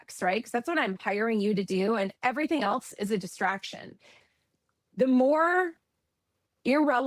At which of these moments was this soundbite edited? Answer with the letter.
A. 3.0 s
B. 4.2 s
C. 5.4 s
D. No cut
B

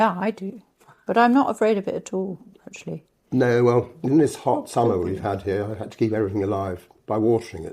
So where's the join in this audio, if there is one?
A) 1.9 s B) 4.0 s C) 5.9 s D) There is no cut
B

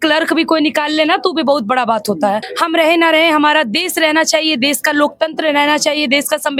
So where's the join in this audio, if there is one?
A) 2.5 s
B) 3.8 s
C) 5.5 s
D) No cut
A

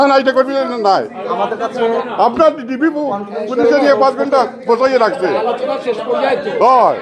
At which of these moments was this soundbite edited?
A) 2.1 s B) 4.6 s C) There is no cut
C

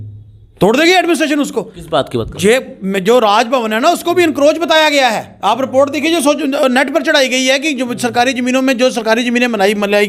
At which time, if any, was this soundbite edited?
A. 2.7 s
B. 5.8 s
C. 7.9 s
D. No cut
D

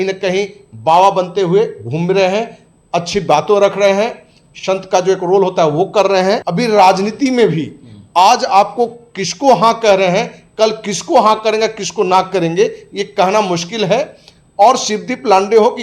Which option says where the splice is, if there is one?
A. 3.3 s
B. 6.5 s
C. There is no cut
B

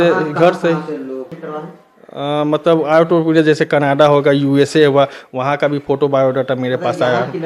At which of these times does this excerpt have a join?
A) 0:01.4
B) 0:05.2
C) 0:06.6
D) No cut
A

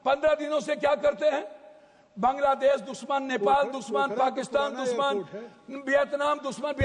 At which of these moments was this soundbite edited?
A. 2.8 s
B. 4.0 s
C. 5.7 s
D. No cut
D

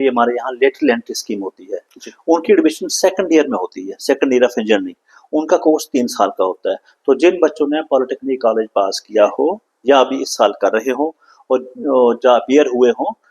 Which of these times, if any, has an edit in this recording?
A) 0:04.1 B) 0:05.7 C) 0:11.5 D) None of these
D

